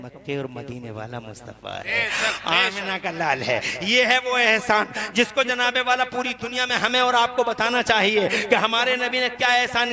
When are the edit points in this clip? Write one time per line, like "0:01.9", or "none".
none